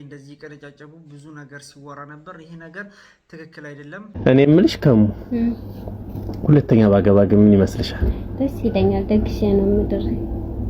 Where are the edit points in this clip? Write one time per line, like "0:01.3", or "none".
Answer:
0:04.1